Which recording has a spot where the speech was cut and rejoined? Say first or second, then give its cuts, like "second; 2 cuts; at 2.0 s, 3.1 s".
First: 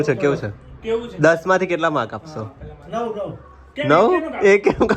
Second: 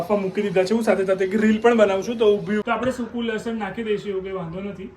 second; 1 cut; at 2.6 s